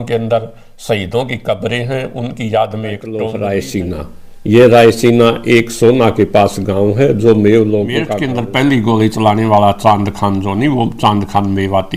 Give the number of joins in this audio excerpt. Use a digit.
2